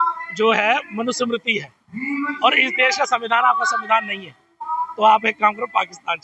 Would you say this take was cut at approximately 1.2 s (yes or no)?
no